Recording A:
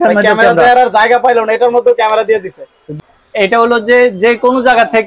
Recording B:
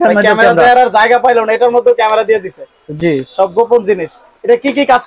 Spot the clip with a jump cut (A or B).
A